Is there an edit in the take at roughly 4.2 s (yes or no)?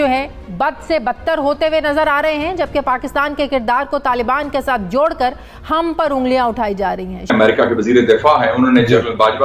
no